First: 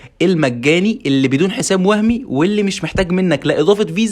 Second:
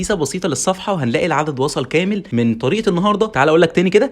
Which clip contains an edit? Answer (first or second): second